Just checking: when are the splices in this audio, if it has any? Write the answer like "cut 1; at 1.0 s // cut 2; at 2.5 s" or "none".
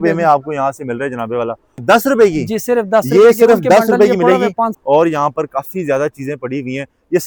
none